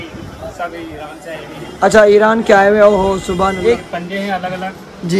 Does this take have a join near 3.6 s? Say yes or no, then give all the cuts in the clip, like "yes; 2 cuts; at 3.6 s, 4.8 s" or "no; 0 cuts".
yes; 1 cut; at 3.6 s